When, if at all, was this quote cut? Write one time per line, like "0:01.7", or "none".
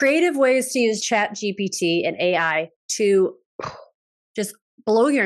0:01.0